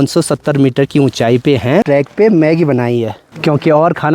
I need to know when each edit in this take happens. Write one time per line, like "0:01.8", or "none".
0:01.8

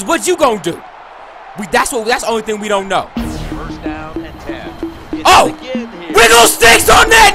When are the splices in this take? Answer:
none

